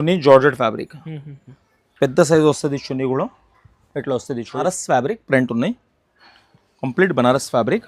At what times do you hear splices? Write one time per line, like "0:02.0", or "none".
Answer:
0:04.6